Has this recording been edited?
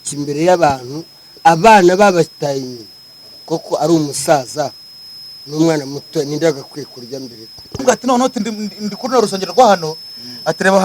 yes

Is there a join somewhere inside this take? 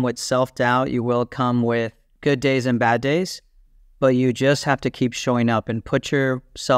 yes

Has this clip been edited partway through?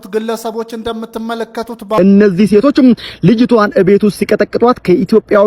yes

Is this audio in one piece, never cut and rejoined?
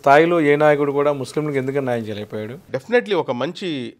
no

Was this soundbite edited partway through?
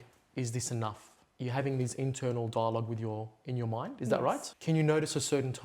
yes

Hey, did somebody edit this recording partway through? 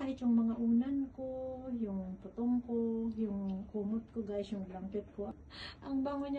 yes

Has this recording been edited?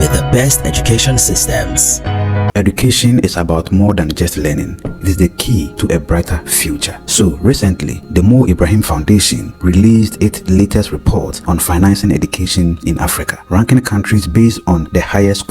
yes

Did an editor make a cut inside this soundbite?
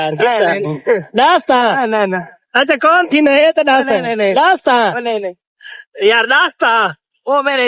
no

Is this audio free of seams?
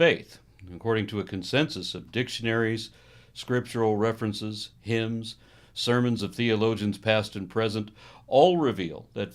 no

